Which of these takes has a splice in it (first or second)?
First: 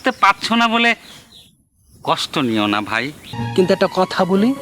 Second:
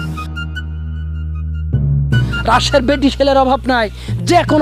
first